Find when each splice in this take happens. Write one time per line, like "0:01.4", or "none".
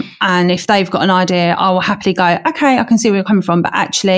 none